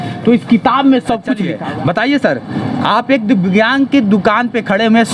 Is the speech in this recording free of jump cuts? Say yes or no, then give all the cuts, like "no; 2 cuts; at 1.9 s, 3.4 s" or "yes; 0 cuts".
no; 1 cut; at 1.5 s